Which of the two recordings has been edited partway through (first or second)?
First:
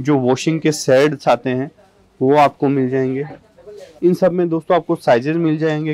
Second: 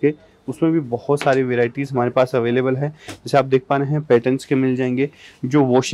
first